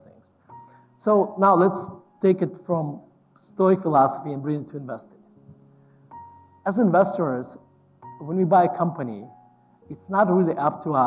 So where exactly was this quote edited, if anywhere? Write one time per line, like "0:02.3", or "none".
none